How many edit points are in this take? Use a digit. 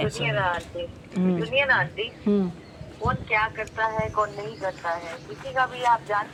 0